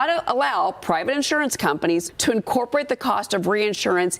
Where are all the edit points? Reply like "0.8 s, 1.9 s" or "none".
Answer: 2.1 s